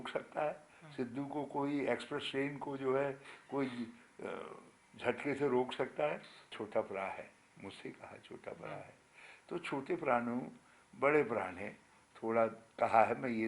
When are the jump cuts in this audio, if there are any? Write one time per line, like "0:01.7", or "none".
0:06.5